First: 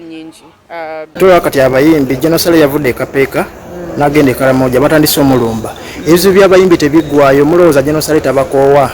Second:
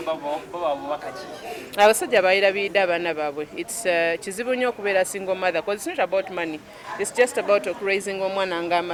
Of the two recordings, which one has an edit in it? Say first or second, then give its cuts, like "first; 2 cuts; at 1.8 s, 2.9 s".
first; 1 cut; at 1.1 s